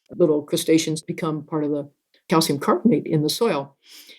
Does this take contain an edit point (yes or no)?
yes